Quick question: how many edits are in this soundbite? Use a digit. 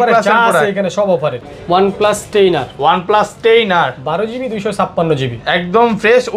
1